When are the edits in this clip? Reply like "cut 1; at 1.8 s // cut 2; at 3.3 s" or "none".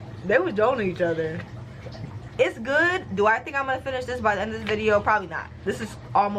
cut 1; at 2.3 s // cut 2; at 5.5 s